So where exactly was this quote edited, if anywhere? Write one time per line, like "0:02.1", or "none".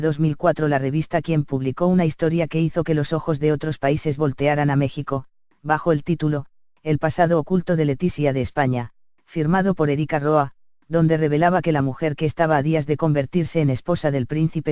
none